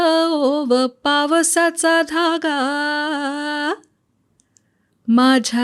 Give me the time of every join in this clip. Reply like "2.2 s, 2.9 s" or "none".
none